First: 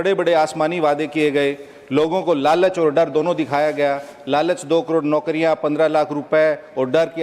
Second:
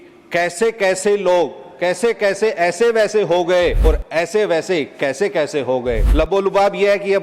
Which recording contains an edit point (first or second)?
second